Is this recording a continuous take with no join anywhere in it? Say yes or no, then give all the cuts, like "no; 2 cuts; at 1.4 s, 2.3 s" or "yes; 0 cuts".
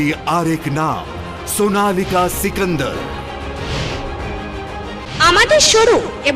no; 1 cut; at 5.1 s